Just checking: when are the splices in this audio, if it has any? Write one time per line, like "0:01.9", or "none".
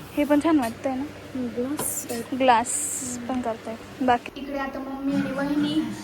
0:04.3